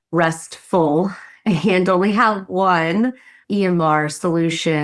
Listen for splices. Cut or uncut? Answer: uncut